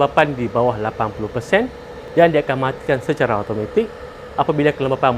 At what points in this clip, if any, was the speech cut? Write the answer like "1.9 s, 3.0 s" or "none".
none